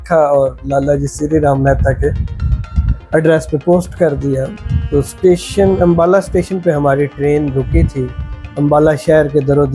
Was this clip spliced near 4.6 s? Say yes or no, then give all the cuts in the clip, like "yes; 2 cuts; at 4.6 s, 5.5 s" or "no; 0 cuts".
yes; 1 cut; at 4.6 s